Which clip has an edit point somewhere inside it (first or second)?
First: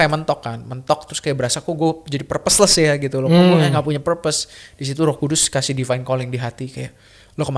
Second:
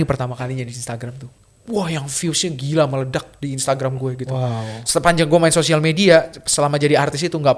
second